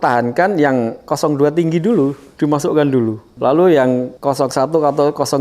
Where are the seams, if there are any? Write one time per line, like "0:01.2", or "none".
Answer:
0:03.3
0:04.1